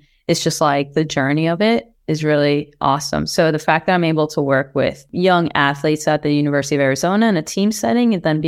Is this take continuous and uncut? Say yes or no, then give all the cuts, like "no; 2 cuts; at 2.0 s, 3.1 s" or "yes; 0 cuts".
no; 1 cut; at 5.0 s